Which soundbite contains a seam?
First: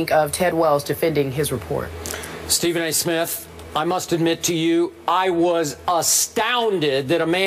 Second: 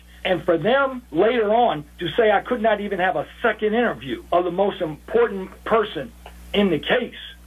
second; 1 cut; at 3.6 s

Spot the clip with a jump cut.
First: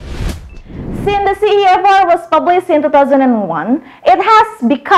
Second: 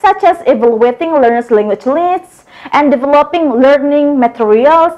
first; 1 cut; at 1.1 s

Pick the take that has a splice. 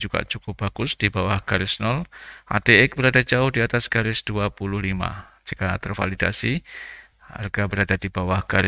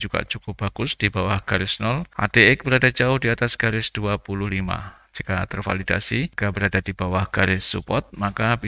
second; 2 cuts; at 2.1 s, 6.3 s

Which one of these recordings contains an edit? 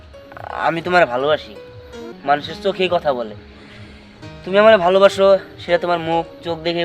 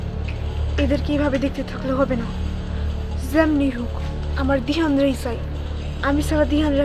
first; 1 cut; at 2.0 s

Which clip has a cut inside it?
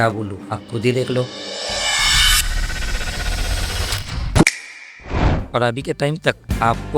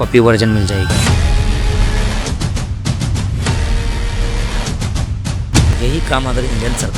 first; 1 cut; at 5.4 s

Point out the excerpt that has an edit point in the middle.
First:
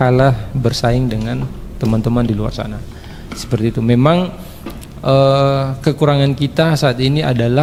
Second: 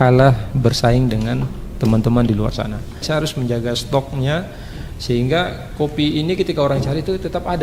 second; 1 cut; at 3.0 s

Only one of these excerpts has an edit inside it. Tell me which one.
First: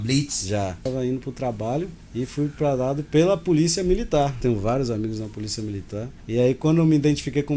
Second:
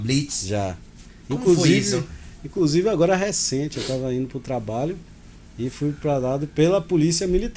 first; 4 cuts; at 0.8 s, 2.0 s, 4.4 s, 6.1 s

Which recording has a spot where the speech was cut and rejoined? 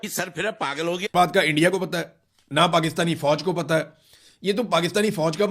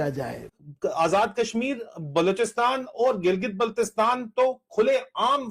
first; 1 cut; at 1.1 s

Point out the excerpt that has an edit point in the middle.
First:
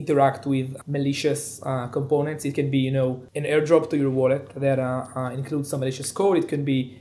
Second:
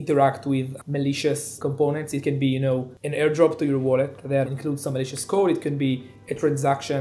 second; 2 cuts; at 1.5 s, 4.5 s

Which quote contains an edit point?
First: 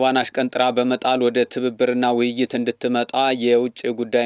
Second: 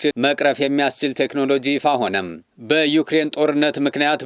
second; 1 cut; at 2.4 s

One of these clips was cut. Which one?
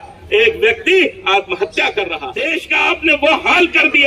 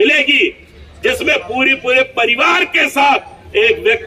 first; 1 cut; at 2.3 s

